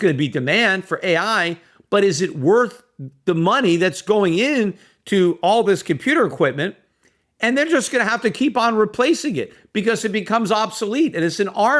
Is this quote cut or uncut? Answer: uncut